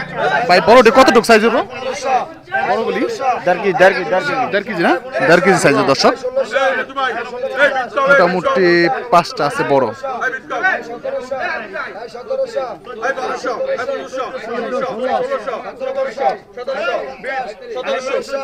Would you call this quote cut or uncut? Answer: uncut